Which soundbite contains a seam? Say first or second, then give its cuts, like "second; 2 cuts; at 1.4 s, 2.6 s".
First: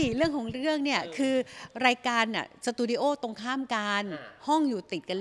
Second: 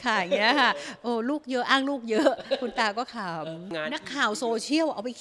second; 1 cut; at 3.7 s